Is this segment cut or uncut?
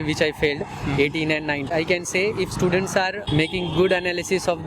cut